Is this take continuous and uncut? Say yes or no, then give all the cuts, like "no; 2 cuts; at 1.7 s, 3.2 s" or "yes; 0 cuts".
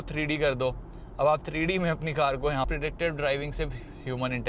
no; 1 cut; at 2.7 s